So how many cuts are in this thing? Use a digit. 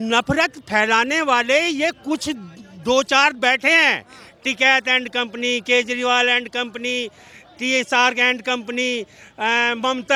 0